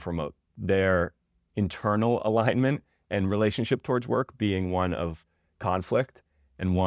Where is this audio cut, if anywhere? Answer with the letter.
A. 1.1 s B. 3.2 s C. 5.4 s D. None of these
D